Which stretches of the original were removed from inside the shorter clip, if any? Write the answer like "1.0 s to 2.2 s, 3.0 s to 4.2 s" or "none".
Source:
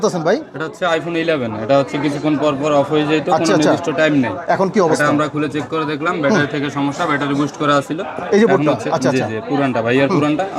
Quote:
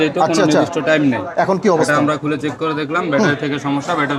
none